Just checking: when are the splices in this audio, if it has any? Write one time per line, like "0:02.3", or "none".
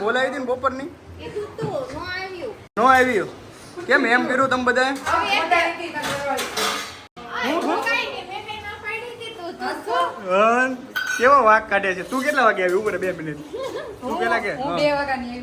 none